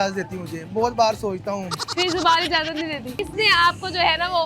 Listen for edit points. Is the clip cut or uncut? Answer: cut